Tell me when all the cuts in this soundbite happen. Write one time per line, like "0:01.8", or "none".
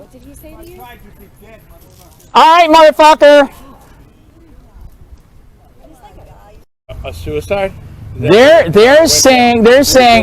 0:07.1